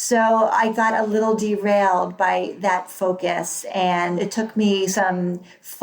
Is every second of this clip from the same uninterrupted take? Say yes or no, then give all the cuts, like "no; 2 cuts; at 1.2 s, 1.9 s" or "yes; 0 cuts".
no; 1 cut; at 4.2 s